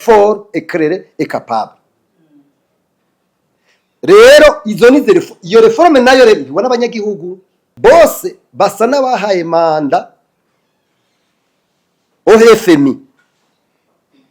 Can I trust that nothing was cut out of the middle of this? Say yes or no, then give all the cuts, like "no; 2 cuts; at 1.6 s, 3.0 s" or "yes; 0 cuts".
no; 1 cut; at 7.6 s